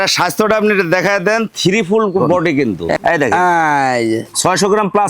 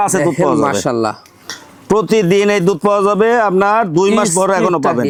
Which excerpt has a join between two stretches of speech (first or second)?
first